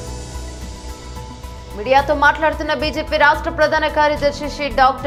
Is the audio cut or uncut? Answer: uncut